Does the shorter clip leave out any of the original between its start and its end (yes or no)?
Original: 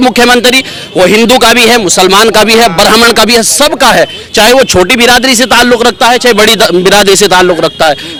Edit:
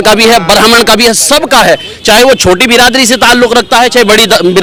no